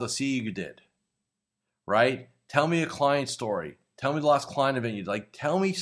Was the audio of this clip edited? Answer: no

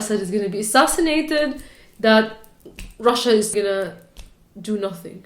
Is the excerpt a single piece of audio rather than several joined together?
no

